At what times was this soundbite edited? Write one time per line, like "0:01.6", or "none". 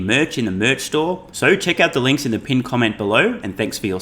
0:01.3